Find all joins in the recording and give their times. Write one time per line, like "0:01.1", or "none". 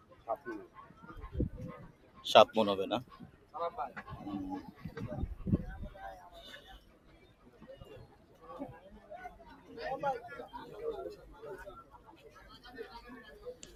none

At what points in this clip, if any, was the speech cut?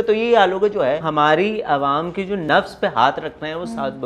0:01.1
0:02.4

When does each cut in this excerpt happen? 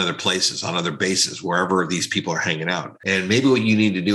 0:02.9

